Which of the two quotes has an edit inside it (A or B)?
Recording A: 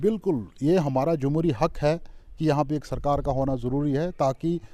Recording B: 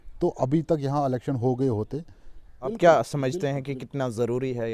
B